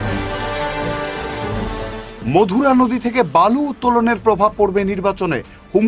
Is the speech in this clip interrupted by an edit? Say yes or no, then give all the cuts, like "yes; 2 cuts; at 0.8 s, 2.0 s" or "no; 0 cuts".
yes; 1 cut; at 1.5 s